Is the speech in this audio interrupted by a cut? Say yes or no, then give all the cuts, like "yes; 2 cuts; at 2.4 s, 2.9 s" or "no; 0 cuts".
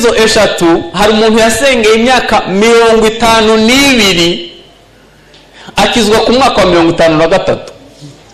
no; 0 cuts